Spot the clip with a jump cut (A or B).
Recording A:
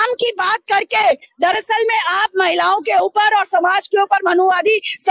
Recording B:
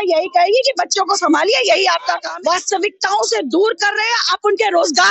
B